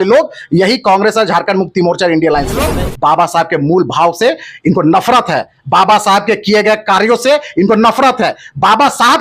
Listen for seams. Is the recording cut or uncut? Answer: cut